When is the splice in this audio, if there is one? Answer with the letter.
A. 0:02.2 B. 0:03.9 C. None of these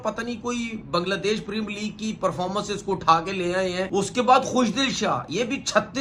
B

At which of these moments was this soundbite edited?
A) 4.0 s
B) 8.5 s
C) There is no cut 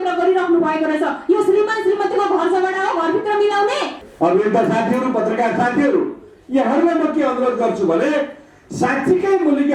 A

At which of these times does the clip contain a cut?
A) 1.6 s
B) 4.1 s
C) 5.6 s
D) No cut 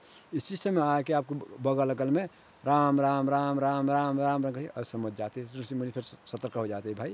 D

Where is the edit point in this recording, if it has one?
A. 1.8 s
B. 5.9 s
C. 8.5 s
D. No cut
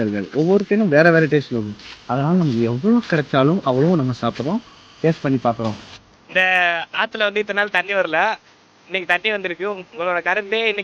B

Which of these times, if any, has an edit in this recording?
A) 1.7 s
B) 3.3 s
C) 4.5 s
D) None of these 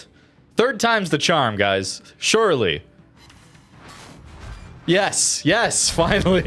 D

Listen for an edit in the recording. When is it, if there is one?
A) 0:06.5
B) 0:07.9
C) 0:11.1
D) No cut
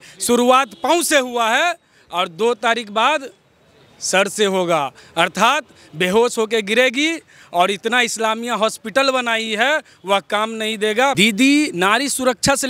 C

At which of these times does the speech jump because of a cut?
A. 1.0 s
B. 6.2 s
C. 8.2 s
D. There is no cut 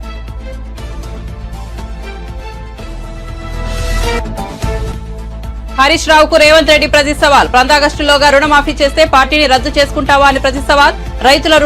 A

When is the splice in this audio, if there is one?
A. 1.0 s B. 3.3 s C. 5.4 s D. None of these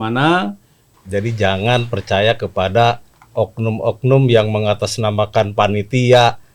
A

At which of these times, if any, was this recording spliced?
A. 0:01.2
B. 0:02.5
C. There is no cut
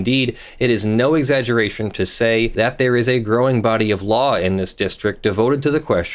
B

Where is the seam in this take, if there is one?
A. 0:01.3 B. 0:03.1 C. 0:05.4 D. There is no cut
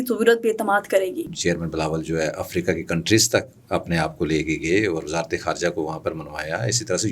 A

